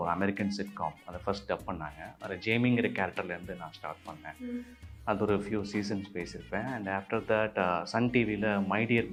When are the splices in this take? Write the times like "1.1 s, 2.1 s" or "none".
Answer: none